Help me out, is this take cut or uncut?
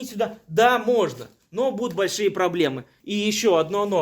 cut